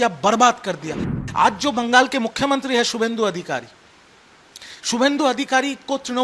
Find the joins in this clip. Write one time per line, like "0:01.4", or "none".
0:01.0